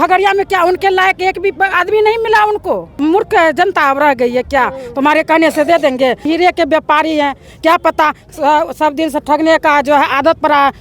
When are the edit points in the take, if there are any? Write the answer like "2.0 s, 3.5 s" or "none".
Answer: 3.0 s, 6.3 s